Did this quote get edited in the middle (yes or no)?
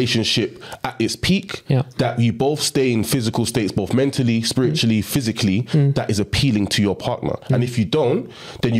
no